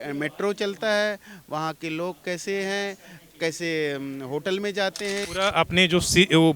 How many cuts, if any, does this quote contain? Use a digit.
1